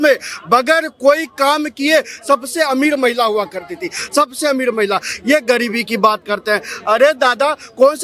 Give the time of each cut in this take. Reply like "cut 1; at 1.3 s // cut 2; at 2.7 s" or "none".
none